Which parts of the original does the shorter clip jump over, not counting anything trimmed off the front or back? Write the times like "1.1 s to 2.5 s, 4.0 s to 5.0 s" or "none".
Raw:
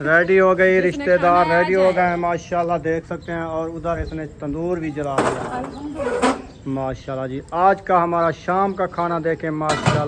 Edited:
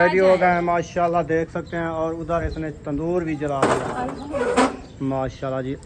5.8 s to 5.9 s